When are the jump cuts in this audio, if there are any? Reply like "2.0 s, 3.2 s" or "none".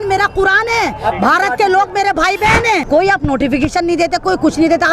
2.8 s

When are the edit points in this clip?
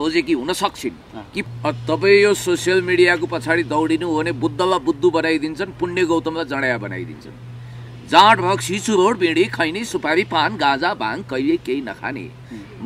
1.4 s

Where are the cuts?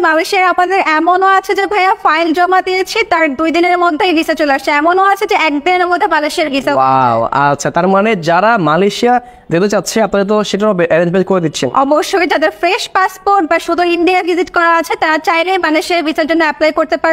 none

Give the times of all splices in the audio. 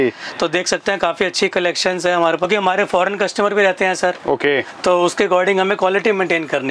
2.4 s

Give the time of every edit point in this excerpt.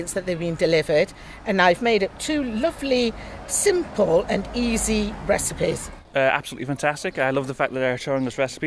6.0 s

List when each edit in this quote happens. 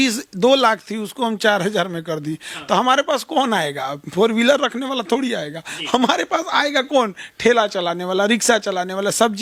none

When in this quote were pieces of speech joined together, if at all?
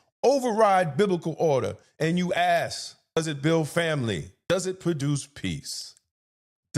3.2 s, 4.3 s

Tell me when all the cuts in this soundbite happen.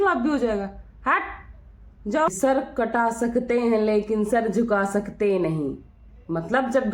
2.3 s

